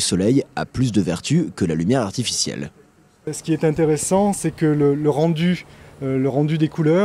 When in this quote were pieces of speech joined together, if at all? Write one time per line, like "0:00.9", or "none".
0:02.1